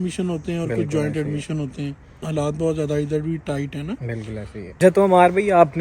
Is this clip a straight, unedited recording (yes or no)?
no